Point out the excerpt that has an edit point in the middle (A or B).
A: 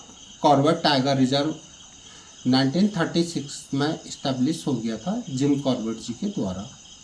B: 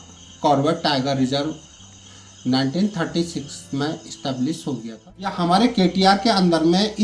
B